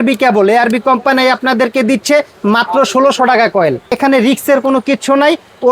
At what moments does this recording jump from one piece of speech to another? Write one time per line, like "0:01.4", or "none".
0:04.0